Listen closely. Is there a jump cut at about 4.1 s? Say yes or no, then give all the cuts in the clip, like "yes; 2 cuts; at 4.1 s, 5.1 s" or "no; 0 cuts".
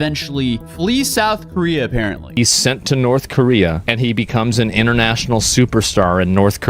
no; 1 cut; at 2.3 s